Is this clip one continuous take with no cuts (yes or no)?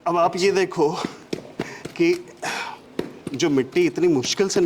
yes